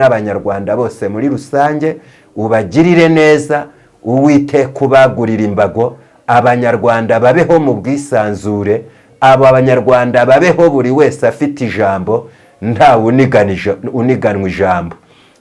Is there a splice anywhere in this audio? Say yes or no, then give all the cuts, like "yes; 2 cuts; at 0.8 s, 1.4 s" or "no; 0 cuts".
no; 0 cuts